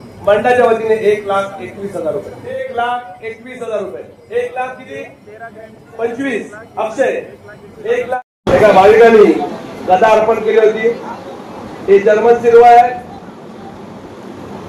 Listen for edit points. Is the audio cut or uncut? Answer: cut